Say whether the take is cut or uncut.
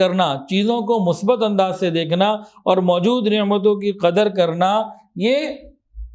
uncut